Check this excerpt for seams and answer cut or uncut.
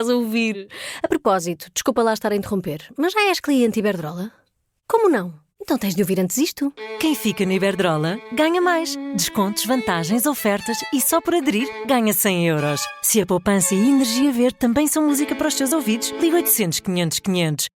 uncut